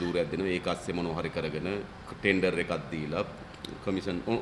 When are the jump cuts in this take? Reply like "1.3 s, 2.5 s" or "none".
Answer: 2.0 s